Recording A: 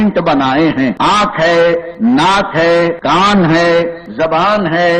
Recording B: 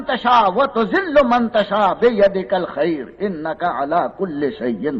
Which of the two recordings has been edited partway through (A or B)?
A